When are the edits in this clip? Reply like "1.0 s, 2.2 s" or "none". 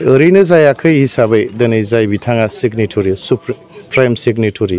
none